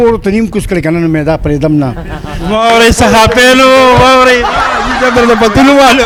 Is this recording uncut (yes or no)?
yes